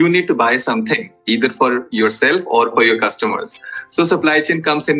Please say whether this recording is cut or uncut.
uncut